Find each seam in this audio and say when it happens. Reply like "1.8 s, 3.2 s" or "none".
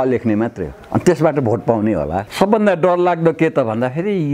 2.3 s